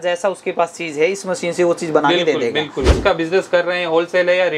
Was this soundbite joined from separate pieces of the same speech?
yes; 1 cut; at 2.9 s

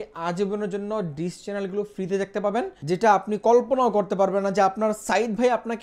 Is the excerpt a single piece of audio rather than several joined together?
no; 1 cut; at 2.8 s

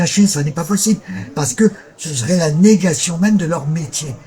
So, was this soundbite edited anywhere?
no; 0 cuts

